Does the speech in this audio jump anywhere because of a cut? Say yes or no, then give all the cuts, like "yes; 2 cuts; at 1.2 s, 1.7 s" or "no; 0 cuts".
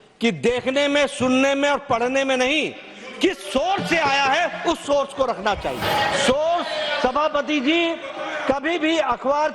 yes; 1 cut; at 5.8 s